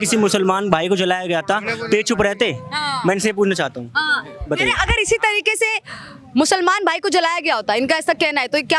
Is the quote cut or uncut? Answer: uncut